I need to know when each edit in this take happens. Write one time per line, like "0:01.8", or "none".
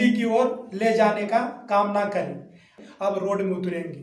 0:02.8